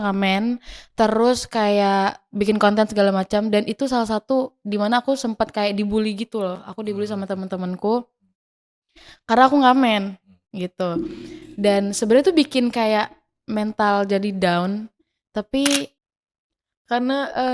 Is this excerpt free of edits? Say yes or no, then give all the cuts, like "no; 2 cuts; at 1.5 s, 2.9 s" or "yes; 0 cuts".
no; 1 cut; at 16.0 s